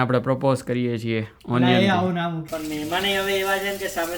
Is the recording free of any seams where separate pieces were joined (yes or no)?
no